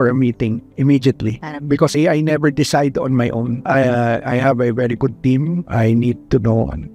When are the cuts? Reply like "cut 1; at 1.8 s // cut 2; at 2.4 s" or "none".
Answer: cut 1; at 1.9 s // cut 2; at 3.6 s